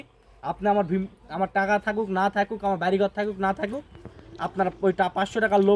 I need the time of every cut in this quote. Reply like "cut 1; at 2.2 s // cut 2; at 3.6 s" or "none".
none